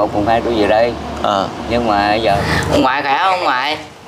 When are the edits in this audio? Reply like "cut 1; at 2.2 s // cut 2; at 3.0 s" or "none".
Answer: cut 1; at 2.2 s